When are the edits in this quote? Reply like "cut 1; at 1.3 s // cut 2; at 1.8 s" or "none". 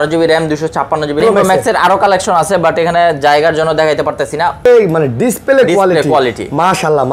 cut 1; at 1.2 s // cut 2; at 4.6 s

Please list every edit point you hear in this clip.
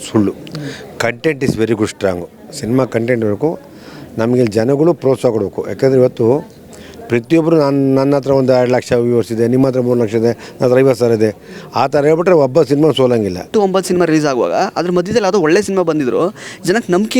cut 1; at 13.5 s

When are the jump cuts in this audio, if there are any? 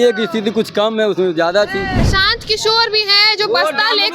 cut 1; at 2.0 s

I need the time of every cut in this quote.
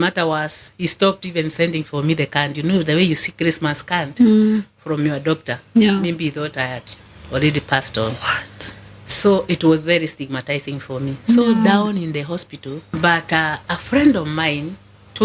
cut 1; at 12.8 s

